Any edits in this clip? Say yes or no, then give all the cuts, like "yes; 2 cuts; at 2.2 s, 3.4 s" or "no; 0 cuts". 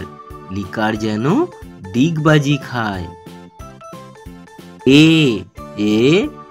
no; 0 cuts